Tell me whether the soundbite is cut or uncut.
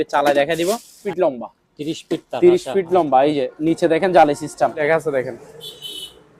cut